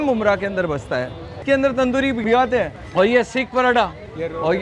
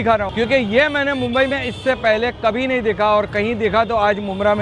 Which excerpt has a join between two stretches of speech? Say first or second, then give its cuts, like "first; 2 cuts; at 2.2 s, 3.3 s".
first; 2 cuts; at 1.2 s, 2.2 s